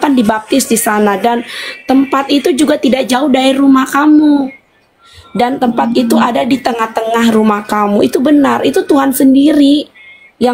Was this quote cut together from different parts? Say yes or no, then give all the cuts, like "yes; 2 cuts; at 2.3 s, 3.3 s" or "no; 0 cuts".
no; 0 cuts